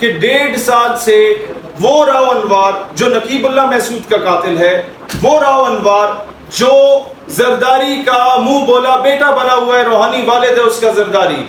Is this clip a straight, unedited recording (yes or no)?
yes